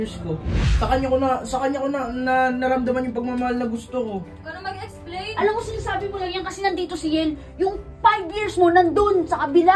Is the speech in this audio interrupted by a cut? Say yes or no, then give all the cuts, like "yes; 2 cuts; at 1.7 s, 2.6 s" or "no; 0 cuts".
no; 0 cuts